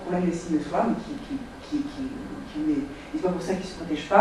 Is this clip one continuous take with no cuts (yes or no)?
no